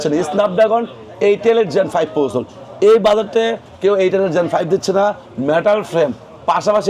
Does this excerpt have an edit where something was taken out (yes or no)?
no